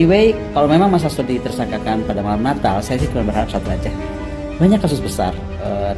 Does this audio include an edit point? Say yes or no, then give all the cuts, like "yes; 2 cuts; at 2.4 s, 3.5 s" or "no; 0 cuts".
no; 0 cuts